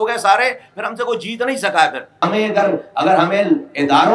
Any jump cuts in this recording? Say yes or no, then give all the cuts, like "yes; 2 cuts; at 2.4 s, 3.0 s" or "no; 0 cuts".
yes; 1 cut; at 2.2 s